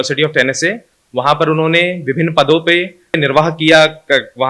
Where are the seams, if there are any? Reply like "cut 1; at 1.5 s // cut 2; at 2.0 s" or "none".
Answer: cut 1; at 3.2 s